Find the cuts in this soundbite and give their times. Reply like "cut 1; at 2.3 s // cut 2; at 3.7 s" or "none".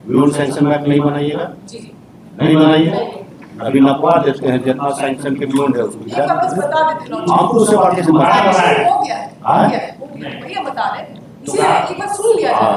none